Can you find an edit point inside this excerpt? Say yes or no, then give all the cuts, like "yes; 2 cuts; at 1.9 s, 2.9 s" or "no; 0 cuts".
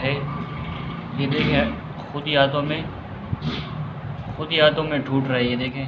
no; 0 cuts